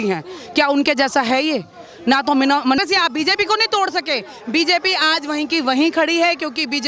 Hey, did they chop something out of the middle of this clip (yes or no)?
yes